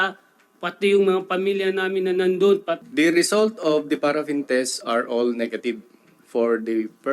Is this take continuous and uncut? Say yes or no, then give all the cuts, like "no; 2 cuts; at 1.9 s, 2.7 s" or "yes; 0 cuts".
no; 1 cut; at 2.8 s